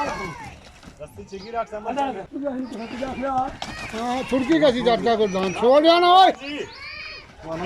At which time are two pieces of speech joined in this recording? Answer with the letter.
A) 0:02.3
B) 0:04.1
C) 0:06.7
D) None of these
A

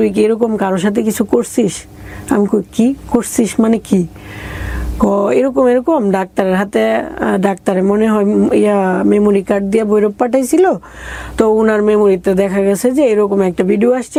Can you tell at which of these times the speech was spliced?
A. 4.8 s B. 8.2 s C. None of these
C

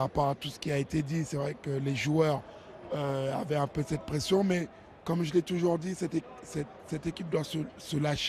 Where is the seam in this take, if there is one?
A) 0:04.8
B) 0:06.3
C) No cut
A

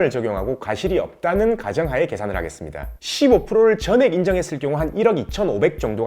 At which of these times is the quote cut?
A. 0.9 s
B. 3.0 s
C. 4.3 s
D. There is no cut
B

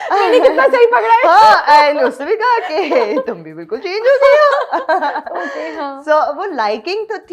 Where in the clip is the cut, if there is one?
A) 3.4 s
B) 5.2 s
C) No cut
C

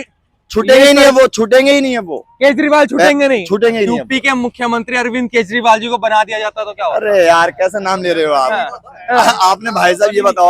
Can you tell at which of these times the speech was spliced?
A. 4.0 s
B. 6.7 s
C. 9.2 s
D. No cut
A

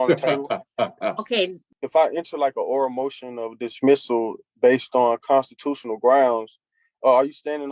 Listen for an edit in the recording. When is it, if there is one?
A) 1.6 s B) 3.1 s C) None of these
A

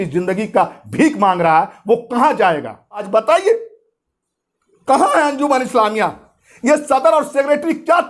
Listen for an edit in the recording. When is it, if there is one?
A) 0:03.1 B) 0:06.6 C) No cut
A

